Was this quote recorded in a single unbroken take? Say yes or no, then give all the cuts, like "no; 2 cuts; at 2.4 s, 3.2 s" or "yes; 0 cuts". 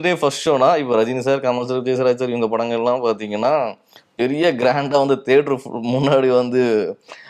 yes; 0 cuts